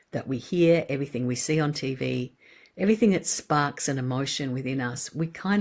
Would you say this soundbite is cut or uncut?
uncut